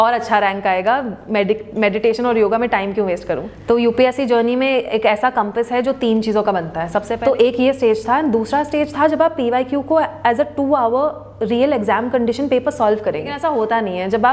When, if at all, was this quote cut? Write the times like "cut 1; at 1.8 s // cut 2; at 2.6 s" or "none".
cut 1; at 3.5 s // cut 2; at 7.1 s // cut 3; at 13.4 s

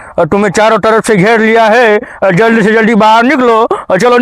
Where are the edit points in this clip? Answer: none

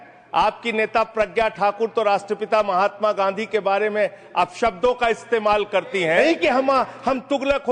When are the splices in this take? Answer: cut 1; at 6.2 s

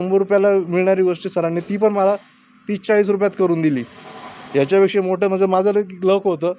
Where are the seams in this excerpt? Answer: none

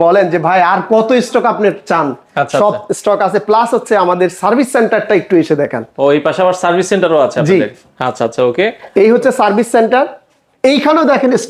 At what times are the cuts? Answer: none

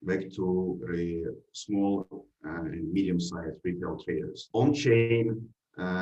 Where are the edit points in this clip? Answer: cut 1; at 4.4 s

